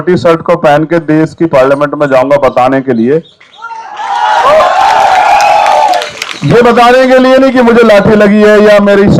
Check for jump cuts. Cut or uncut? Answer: uncut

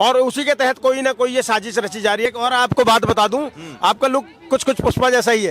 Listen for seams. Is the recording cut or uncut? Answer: cut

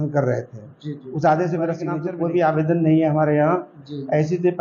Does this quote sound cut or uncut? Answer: cut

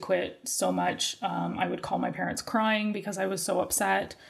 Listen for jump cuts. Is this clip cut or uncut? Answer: uncut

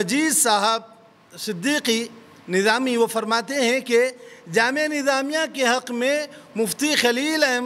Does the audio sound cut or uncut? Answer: uncut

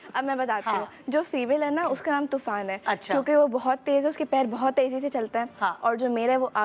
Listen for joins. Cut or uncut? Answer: uncut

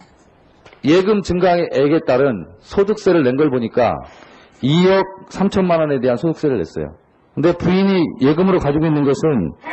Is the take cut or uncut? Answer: cut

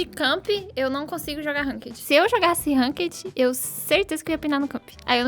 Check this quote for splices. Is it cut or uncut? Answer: cut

